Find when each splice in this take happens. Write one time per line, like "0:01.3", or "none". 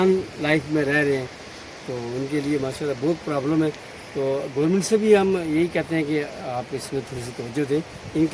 none